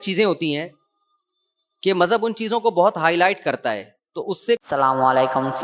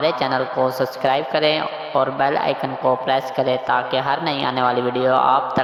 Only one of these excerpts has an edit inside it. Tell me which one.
first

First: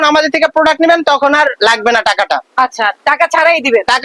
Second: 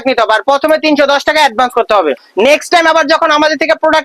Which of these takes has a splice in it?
second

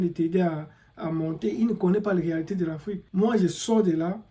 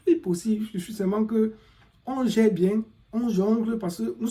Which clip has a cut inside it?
first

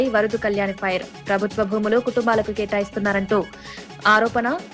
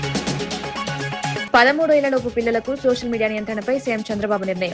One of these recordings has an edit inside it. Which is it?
second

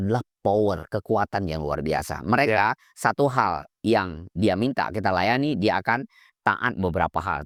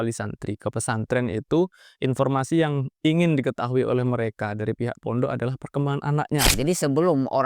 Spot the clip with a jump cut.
second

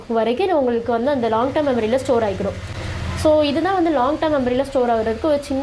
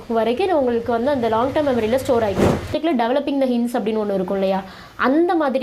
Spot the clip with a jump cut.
second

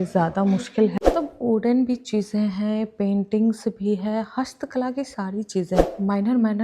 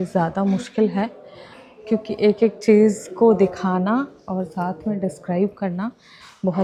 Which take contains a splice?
first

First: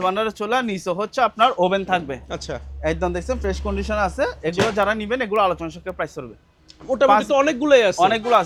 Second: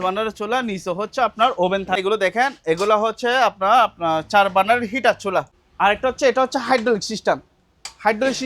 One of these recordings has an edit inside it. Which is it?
second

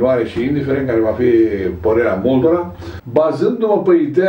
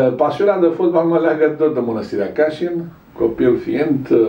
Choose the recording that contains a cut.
first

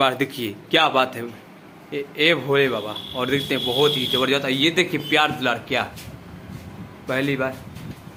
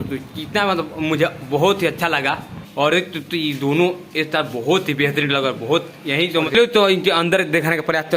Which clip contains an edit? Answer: second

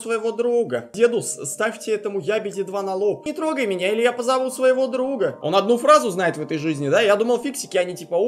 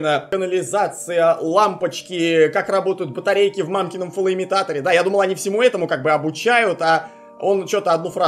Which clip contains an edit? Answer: first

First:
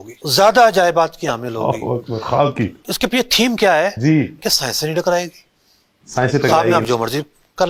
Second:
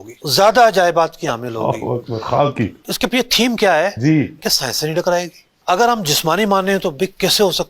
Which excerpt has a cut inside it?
second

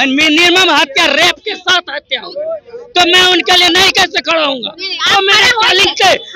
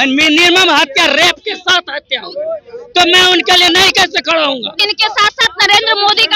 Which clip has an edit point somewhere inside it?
second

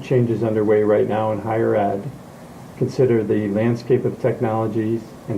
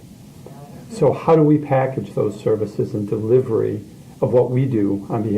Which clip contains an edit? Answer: second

